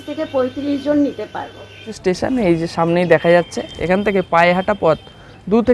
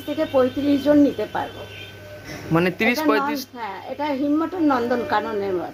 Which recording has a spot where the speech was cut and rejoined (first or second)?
first